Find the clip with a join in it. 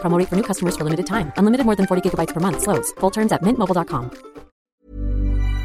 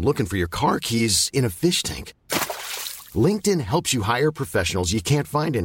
first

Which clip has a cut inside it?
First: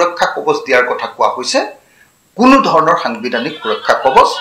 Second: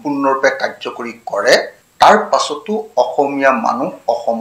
second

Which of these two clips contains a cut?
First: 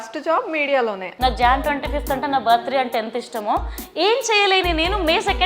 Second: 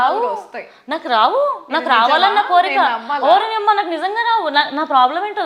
first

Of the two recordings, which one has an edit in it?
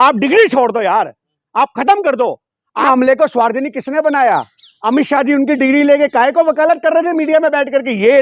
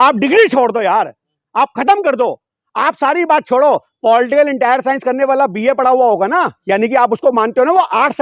first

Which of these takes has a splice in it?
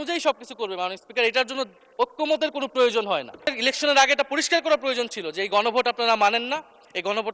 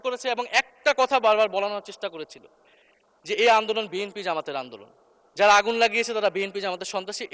first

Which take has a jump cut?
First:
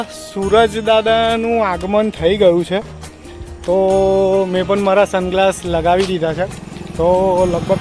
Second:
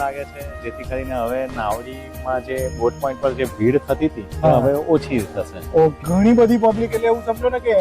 second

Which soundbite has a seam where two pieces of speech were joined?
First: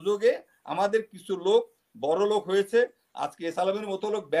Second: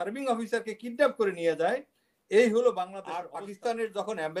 second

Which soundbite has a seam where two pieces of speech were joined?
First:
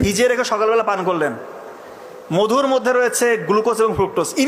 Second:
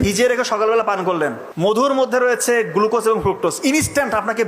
second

